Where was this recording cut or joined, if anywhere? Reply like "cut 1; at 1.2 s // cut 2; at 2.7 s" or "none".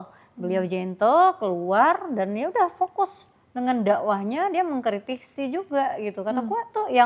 none